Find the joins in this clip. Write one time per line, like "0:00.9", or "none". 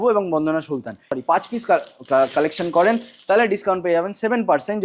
0:01.1

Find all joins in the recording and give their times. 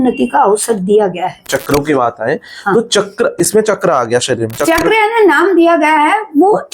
0:01.5

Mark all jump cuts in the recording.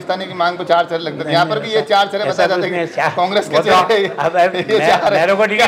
none

